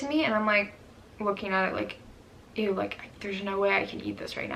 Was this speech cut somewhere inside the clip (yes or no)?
no